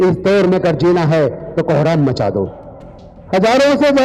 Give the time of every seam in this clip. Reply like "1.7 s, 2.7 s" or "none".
2.6 s